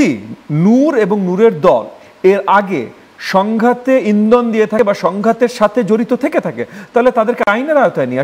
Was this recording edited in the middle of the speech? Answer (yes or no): no